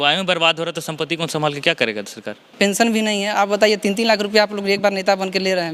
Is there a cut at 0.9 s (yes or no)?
no